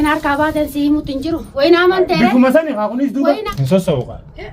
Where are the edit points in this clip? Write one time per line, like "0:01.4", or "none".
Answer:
0:03.3